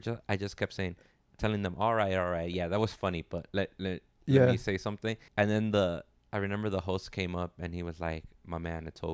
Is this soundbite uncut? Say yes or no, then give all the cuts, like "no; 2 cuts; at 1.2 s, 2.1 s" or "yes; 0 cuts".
no; 1 cut; at 5.2 s